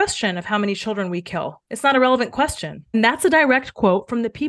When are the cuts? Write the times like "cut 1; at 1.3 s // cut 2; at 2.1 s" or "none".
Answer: none